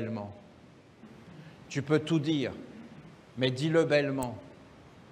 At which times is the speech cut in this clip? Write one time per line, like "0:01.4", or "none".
0:01.1

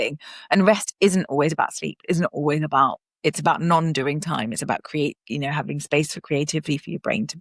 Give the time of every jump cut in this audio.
0:03.1

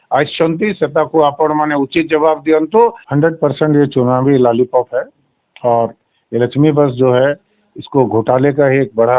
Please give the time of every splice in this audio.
0:03.0

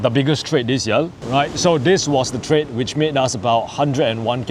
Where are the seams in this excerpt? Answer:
0:01.2

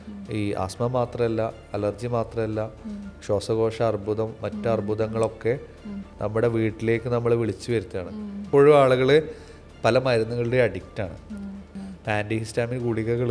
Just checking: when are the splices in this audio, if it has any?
0:08.5
0:11.7

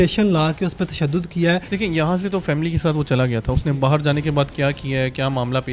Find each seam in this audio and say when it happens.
0:01.7

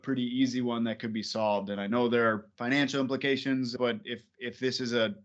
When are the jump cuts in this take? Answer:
0:02.5
0:03.7

